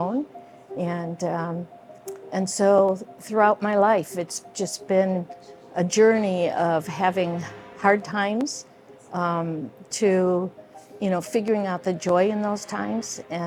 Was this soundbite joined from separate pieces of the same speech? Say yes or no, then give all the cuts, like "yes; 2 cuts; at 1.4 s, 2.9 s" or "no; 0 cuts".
no; 0 cuts